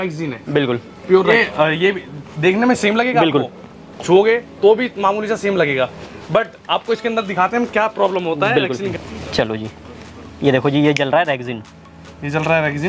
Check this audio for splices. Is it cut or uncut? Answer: cut